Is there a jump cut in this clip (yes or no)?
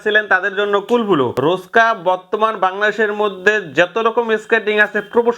yes